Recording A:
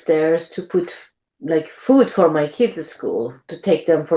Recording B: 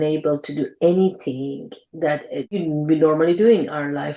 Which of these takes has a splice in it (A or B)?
B